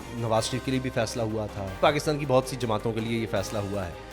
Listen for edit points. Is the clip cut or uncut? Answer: cut